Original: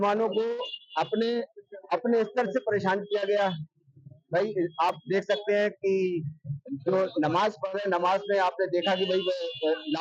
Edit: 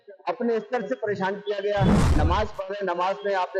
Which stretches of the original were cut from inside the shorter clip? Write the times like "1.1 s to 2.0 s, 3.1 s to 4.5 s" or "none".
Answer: 3.8 s to 7.2 s